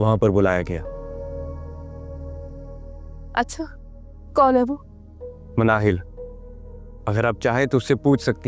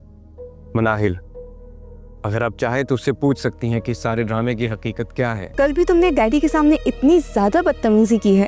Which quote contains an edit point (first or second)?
second